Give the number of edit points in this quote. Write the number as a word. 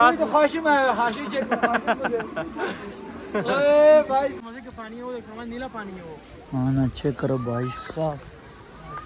one